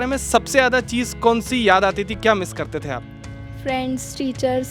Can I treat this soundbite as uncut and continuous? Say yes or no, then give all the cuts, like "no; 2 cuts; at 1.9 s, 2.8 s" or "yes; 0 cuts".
yes; 0 cuts